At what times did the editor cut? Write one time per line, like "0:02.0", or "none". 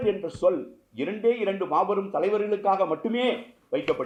none